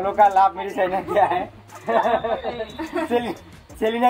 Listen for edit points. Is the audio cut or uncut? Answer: uncut